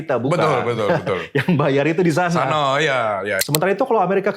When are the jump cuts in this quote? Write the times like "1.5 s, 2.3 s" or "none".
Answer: 3.4 s